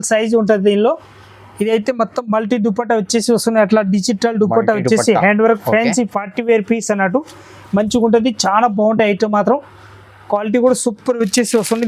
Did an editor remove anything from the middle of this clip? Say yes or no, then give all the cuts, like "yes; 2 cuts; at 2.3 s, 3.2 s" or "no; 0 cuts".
no; 0 cuts